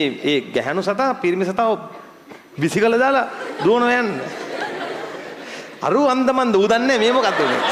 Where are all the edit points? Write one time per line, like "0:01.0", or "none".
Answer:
none

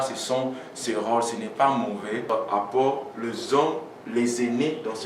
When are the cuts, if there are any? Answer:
0:02.2

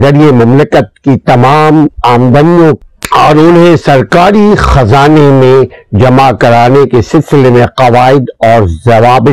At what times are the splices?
0:02.8

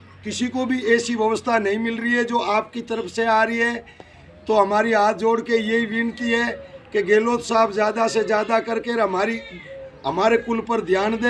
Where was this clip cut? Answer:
none

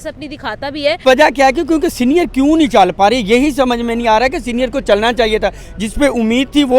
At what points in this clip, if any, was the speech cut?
0:01.0

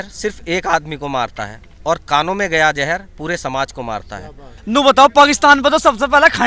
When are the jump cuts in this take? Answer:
0:04.5

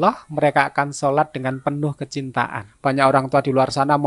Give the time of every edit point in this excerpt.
0:02.6

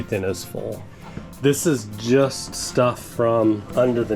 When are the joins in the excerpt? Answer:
0:00.9

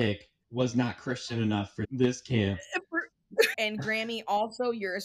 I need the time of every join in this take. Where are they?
0:01.8
0:03.5

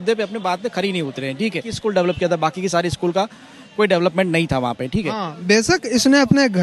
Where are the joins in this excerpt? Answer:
0:01.8
0:05.3

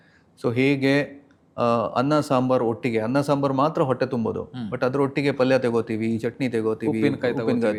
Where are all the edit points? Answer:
none

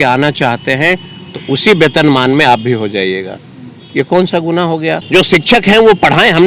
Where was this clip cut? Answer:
0:05.0

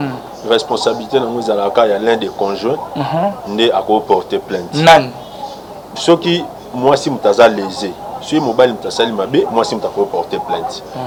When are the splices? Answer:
none

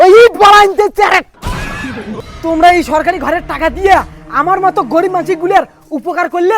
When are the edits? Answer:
0:02.1

